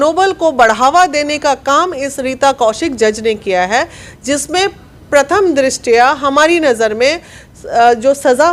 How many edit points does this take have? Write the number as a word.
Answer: zero